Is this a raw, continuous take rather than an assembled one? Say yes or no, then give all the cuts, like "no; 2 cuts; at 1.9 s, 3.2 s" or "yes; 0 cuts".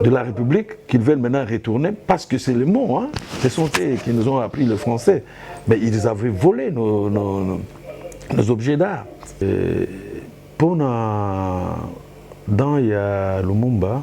no; 1 cut; at 9.4 s